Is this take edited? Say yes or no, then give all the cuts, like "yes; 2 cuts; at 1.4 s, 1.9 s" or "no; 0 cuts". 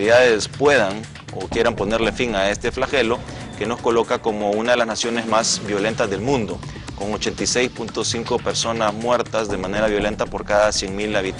yes; 1 cut; at 9.2 s